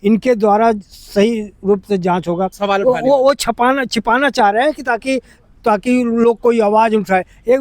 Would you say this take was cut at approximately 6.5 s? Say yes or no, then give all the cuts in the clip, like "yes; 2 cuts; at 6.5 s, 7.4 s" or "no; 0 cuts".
no; 1 cut; at 2.6 s